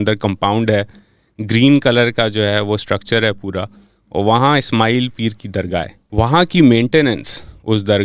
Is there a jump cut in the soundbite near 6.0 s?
yes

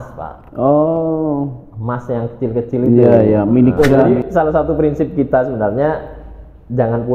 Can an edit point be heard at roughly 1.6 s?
no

